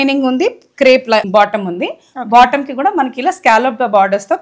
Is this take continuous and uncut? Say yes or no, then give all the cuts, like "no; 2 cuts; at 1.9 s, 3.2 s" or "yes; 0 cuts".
no; 1 cut; at 1.2 s